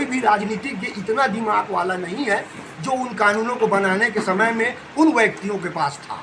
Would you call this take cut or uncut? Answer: uncut